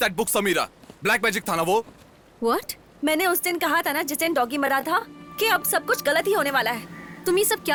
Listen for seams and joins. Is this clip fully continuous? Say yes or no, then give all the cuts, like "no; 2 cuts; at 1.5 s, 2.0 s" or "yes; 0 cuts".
yes; 0 cuts